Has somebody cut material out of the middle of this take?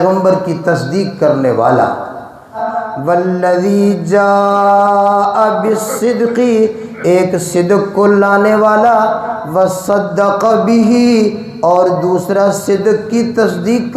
yes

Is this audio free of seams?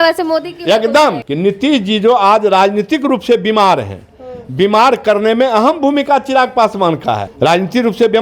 no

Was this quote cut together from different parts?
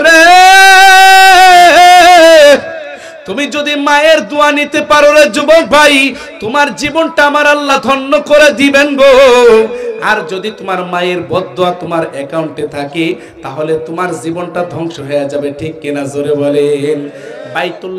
yes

